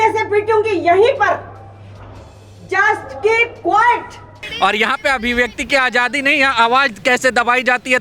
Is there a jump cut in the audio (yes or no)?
yes